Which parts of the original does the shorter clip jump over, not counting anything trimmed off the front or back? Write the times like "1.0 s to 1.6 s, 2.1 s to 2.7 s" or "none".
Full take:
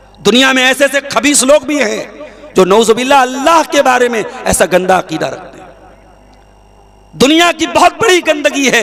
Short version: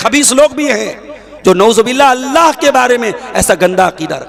none